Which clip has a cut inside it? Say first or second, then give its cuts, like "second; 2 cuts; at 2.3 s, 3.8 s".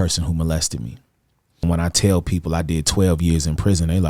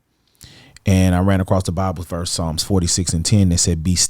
first; 1 cut; at 1.6 s